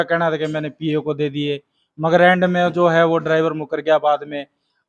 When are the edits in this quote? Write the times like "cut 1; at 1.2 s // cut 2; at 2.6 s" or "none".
none